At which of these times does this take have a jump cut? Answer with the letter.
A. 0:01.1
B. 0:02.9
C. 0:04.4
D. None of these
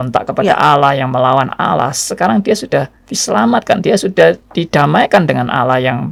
D